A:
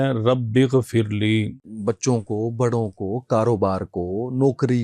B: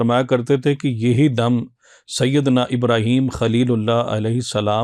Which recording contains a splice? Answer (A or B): A